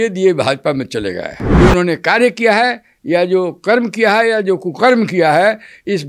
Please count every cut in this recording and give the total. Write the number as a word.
one